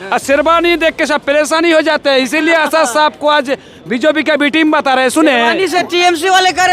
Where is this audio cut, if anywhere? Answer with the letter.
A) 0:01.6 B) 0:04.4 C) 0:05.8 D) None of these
C